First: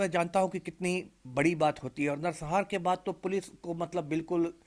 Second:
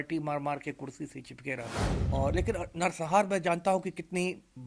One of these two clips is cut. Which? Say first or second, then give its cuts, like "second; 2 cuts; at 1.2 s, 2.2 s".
second; 1 cut; at 1.9 s